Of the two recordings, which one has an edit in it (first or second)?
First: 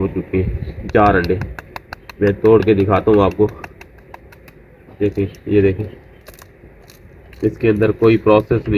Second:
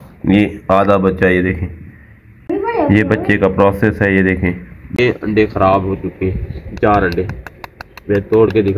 second